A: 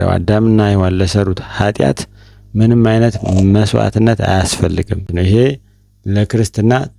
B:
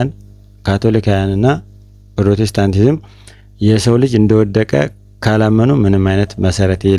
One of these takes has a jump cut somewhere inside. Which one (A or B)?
A